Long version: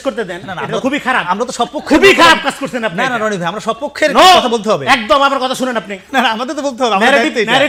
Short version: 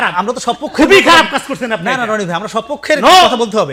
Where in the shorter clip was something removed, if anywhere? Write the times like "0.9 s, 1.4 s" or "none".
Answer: none